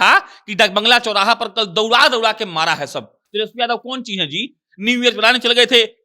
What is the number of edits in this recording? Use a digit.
1